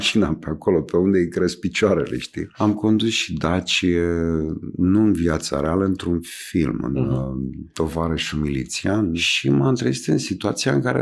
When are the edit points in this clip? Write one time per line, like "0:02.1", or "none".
0:02.4
0:09.3